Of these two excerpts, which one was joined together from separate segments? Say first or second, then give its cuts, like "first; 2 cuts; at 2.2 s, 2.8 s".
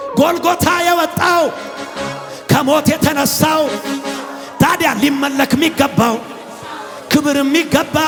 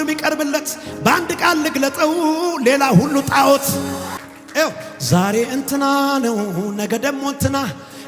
second; 1 cut; at 4.2 s